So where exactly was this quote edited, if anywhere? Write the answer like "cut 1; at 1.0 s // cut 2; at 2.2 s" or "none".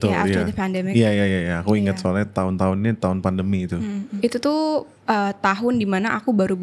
cut 1; at 4.1 s // cut 2; at 4.9 s